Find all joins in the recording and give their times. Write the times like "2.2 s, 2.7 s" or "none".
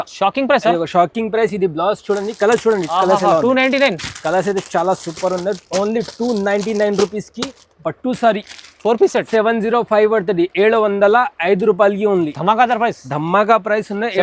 9.3 s